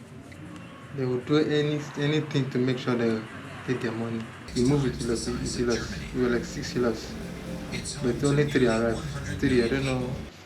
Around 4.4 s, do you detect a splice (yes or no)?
yes